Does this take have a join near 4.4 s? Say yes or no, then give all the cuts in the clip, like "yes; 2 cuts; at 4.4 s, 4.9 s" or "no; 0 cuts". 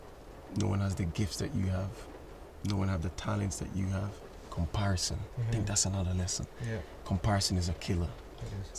yes; 1 cut; at 4.4 s